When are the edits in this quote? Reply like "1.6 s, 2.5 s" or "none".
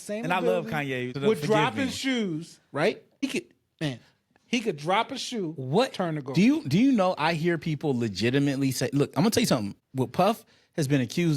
1.1 s, 3.2 s, 9.8 s

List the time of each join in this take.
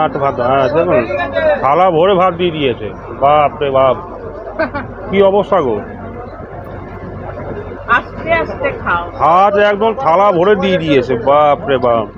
9.2 s

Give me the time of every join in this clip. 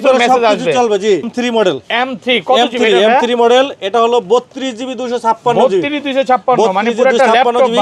1.3 s

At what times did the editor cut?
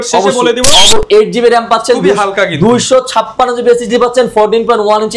1.0 s

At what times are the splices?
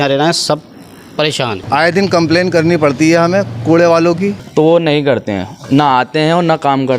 1.6 s, 4.4 s

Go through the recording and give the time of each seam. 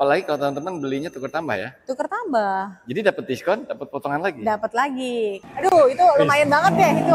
5.4 s

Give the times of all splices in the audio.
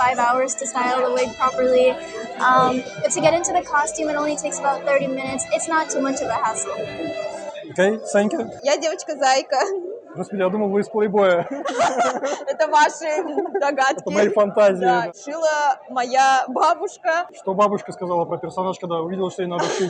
8.5 s, 15.1 s, 17.3 s

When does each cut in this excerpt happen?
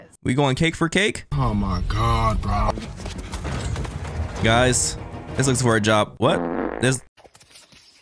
2.7 s

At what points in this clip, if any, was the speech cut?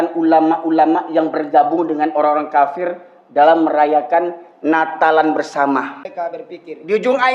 6.3 s

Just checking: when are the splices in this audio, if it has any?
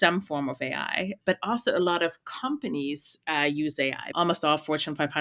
4.0 s

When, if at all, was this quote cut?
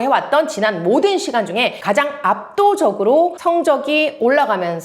1.8 s, 3.4 s

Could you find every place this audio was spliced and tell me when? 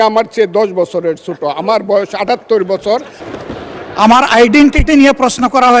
3.2 s

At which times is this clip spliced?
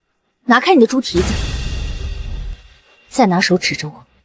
none

